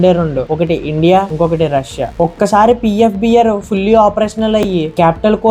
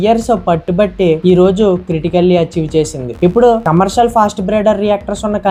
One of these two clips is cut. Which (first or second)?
first